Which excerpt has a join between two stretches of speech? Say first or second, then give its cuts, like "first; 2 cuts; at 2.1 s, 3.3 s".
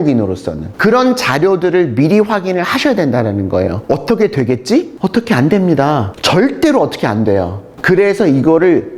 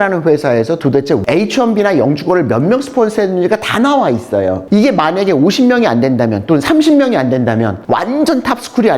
second; 2 cuts; at 1.2 s, 7.8 s